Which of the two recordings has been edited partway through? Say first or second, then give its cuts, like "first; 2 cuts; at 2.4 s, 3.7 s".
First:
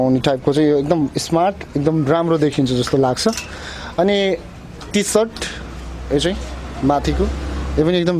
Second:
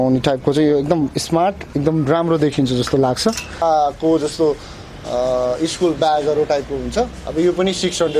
second; 1 cut; at 3.6 s